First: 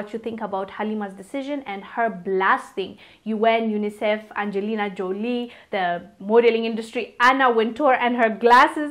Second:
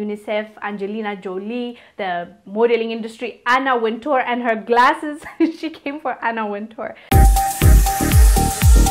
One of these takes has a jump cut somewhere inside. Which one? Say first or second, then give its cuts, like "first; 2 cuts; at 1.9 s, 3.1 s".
second; 1 cut; at 7.0 s